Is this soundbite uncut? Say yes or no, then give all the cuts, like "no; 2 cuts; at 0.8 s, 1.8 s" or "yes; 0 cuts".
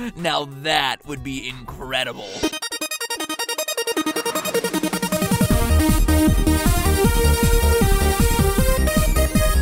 no; 1 cut; at 7.4 s